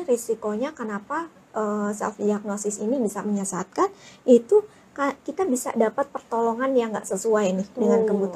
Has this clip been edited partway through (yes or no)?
no